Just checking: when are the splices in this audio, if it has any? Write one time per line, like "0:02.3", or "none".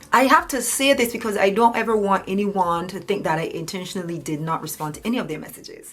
none